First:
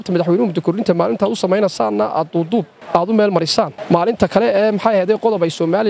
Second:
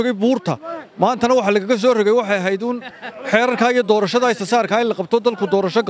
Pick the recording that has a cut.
first; 2 cuts; at 2.8 s, 3.8 s

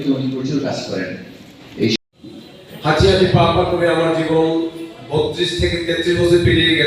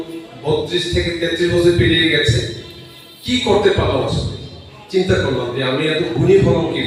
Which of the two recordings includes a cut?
first; 1 cut; at 2.0 s

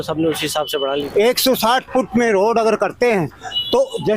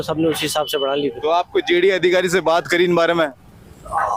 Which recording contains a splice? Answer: first; 1 cut; at 1.1 s

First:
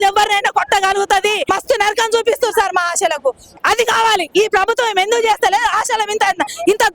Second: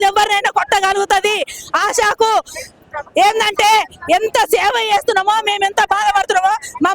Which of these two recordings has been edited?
first; 1 cut; at 1.4 s

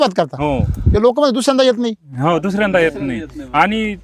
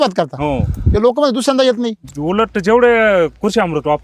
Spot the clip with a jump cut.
second; 1 cut; at 2.0 s

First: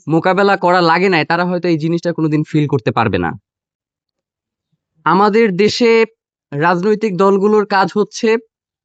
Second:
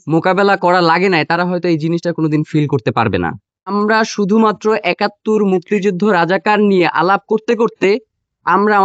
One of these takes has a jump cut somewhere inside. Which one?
second; 1 cut; at 3.7 s

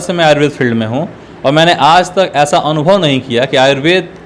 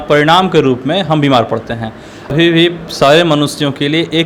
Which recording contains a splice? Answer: second; 1 cut; at 2.3 s

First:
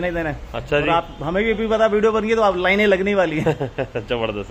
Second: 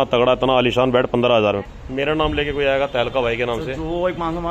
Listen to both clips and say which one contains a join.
second; 1 cut; at 1.6 s

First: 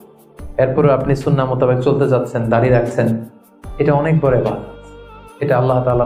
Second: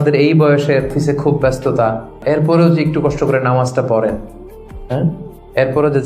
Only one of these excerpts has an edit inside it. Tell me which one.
second; 2 cuts; at 0.9 s, 2.2 s

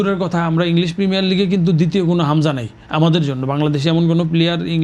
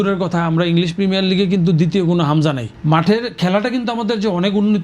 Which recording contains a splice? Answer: second; 1 cut; at 2.7 s

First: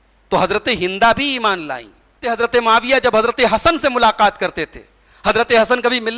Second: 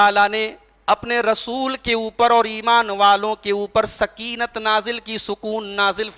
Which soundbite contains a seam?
first; 1 cut; at 2.3 s

